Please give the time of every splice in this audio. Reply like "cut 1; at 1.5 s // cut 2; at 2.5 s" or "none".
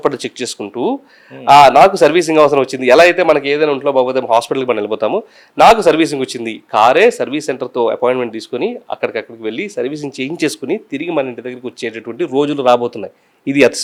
none